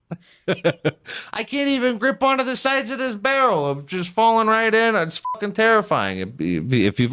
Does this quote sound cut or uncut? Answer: uncut